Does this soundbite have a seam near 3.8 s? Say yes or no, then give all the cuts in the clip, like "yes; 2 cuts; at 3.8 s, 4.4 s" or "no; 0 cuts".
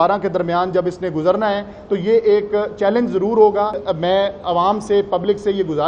yes; 1 cut; at 3.8 s